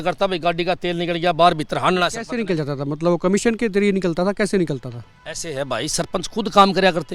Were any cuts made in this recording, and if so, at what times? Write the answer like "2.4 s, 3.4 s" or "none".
none